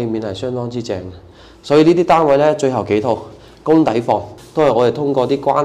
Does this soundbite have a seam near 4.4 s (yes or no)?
yes